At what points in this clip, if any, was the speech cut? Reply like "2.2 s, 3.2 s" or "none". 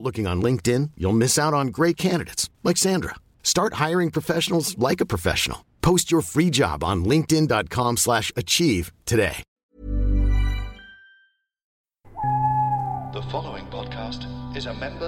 11.9 s